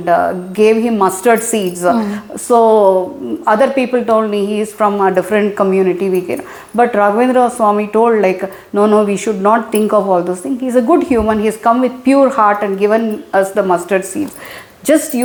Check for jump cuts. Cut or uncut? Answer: uncut